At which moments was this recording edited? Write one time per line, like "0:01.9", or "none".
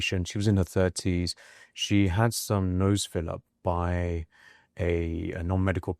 none

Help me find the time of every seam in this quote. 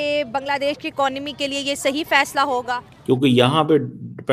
0:02.9

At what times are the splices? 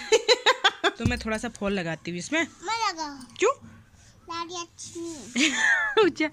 0:01.0

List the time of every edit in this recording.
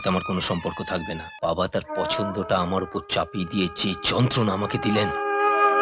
0:01.3

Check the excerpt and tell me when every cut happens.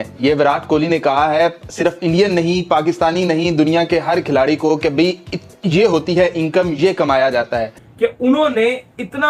0:07.8

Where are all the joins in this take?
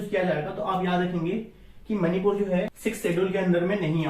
0:02.7

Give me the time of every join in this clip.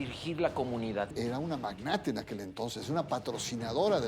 0:01.1

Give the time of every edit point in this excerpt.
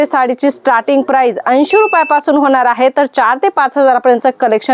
none

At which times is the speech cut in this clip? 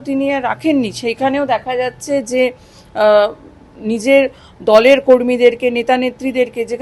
none

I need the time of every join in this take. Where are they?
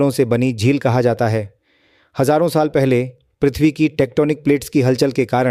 none

